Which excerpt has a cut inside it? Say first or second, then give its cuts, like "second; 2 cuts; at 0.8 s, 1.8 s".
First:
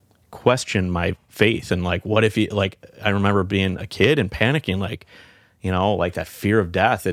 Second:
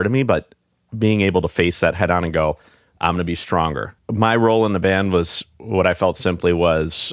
second; 1 cut; at 3.9 s